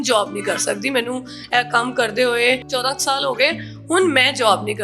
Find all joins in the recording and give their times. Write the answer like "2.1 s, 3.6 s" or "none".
2.7 s